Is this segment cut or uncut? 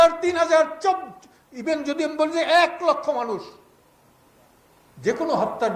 uncut